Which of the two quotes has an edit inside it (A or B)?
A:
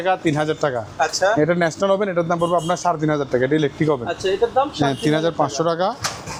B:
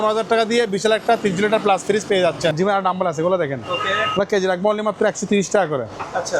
B